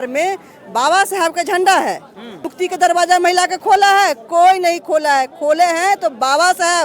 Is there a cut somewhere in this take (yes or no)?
yes